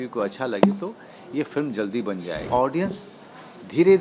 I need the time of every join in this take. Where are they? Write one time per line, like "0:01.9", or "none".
0:02.4